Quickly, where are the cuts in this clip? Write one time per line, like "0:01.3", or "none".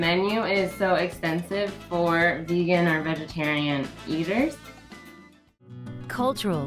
0:04.0
0:05.0